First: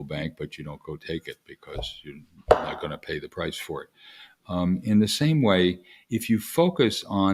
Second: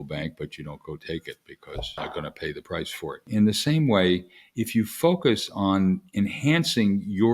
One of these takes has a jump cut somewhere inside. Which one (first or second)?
second